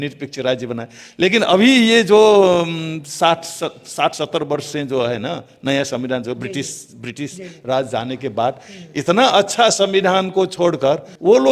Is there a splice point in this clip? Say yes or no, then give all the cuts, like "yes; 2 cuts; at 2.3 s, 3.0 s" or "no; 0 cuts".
no; 0 cuts